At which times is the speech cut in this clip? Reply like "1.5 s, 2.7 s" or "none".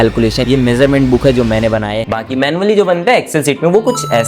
2.1 s